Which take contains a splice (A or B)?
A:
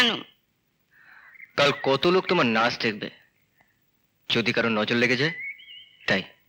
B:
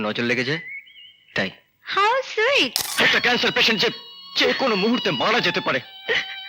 B